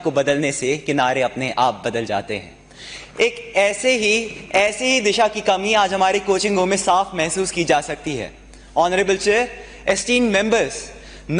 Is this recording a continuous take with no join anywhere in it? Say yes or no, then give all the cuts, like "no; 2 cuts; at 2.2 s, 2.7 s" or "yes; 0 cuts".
yes; 0 cuts